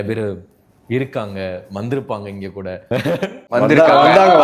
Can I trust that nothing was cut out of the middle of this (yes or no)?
no